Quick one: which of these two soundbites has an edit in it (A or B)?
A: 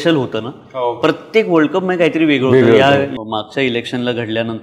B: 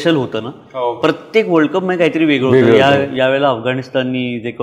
A